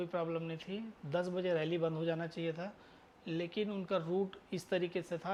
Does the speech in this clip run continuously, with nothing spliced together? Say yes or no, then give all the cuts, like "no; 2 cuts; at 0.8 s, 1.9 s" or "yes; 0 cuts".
yes; 0 cuts